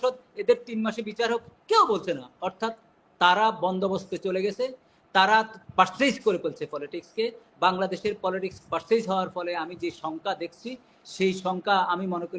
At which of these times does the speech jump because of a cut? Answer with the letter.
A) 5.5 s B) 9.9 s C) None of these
C